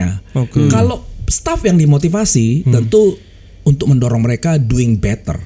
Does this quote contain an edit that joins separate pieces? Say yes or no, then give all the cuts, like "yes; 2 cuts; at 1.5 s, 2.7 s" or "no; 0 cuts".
no; 0 cuts